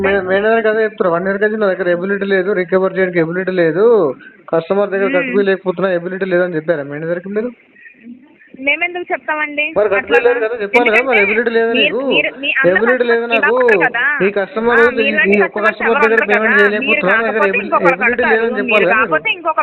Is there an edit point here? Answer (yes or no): no